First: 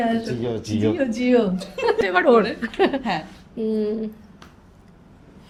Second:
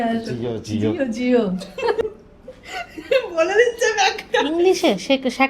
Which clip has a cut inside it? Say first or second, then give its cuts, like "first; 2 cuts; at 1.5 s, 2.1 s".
second; 1 cut; at 2.2 s